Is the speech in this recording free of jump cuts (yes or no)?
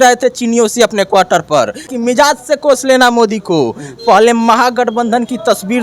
no